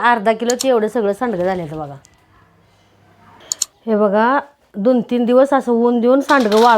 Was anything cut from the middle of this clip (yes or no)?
yes